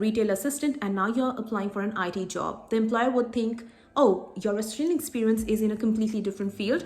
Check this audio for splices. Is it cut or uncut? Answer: uncut